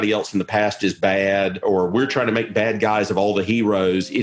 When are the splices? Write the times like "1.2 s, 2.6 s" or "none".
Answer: 1.6 s

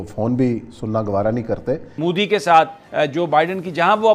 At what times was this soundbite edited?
1.9 s

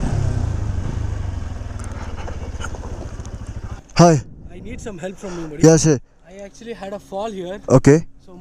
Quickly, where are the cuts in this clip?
3.8 s

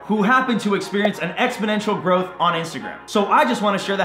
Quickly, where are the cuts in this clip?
none

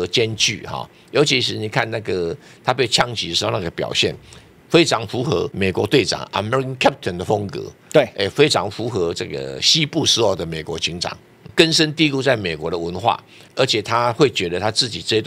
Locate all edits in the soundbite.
5.5 s, 11.4 s, 13.4 s

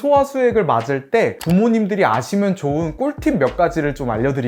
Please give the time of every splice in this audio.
none

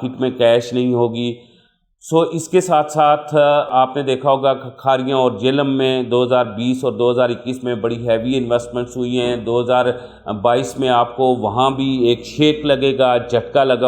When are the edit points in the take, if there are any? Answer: none

